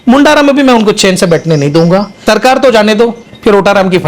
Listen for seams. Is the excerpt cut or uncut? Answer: cut